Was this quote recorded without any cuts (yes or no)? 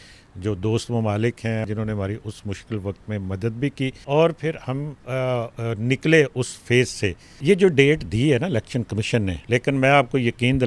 no